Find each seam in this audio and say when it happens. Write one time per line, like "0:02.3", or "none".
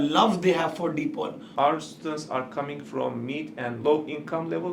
0:01.5
0:03.8